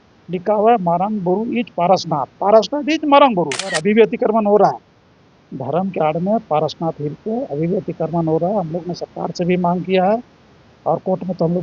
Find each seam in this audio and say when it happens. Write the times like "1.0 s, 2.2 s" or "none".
3.8 s